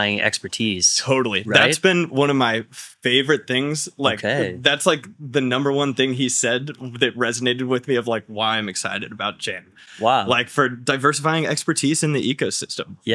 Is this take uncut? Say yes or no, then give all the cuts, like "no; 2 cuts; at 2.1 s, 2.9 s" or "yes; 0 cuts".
yes; 0 cuts